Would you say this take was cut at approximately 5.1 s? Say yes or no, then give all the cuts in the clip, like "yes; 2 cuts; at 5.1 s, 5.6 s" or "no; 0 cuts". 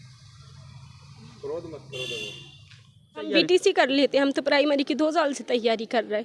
no; 1 cut; at 3.3 s